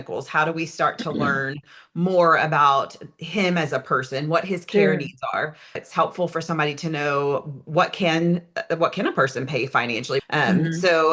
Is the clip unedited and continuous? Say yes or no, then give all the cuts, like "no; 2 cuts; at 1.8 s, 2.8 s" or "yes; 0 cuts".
no; 2 cuts; at 5.8 s, 10.2 s